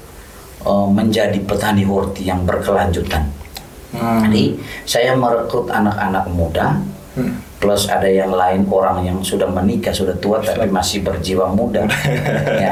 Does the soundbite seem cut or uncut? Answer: uncut